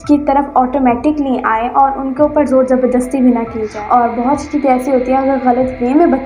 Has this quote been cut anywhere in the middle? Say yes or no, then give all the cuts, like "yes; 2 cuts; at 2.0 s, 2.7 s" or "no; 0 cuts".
yes; 1 cut; at 3.7 s